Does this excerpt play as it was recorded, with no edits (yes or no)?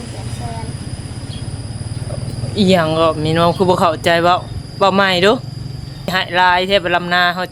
no